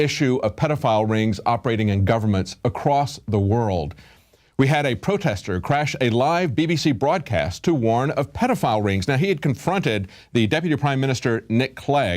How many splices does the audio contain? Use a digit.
0